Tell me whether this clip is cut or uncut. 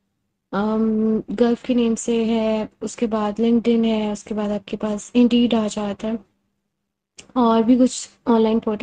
uncut